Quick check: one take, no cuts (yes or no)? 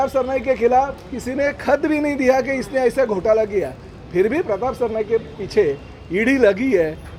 yes